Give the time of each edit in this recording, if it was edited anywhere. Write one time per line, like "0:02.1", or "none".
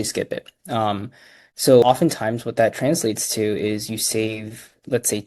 0:01.8

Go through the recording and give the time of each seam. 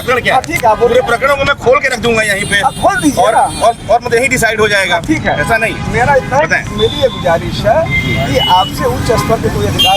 none

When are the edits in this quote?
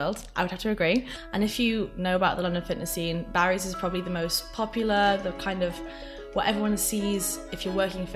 0:01.2

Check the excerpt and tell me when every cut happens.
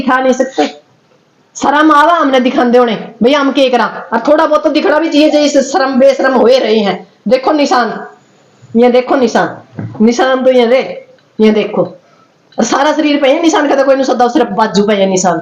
none

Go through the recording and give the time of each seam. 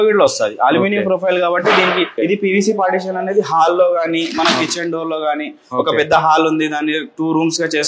0:02.1

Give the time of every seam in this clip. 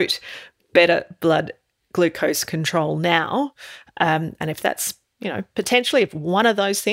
none

